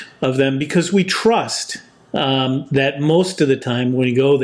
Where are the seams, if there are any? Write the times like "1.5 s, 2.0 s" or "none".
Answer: none

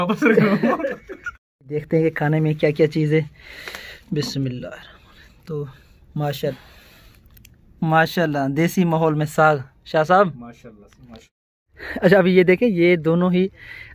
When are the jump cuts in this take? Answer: 1.8 s, 6.5 s, 11.6 s

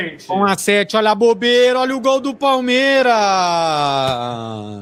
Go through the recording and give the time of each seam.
none

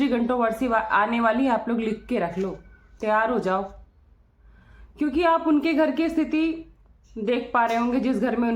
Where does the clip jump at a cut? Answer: none

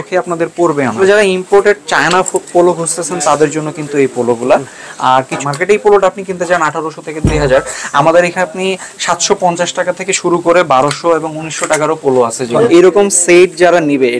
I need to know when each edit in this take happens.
0.9 s, 5.3 s, 12.5 s

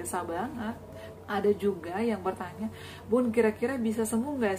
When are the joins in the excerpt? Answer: 1.0 s

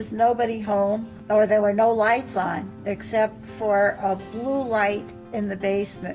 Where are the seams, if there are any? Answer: 1.2 s

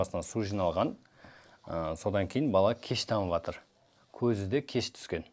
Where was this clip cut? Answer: none

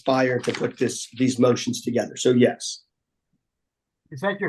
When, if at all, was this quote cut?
3.2 s

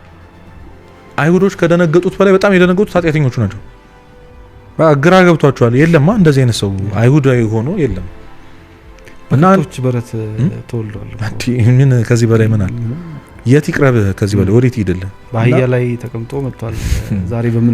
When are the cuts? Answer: none

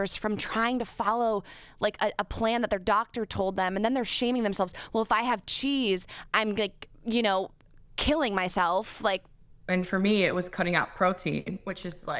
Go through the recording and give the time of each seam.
9.4 s

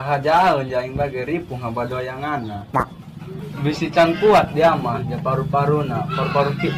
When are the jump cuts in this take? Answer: none

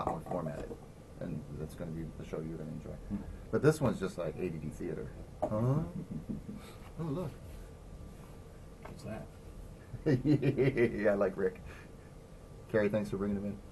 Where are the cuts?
4.2 s

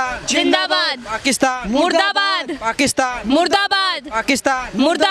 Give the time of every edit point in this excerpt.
none

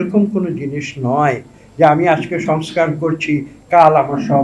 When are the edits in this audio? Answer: none

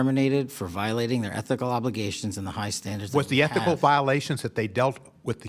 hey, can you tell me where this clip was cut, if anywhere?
none

